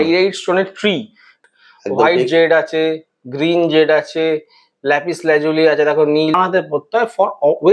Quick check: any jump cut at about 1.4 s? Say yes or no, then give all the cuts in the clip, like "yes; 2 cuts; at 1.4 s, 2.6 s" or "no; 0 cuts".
yes; 2 cuts; at 1.4 s, 6.4 s